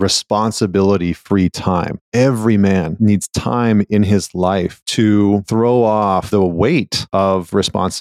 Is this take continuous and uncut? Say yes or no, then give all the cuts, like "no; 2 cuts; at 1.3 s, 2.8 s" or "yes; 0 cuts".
no; 6 cuts; at 2.0 s, 2.9 s, 4.8 s, 5.5 s, 6.3 s, 7.0 s